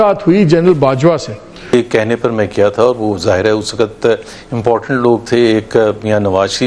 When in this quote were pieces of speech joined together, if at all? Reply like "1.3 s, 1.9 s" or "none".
1.7 s